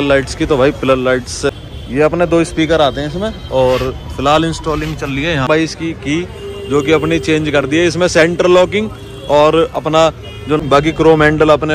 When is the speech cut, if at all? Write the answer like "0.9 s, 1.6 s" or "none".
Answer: 1.5 s, 5.5 s, 10.6 s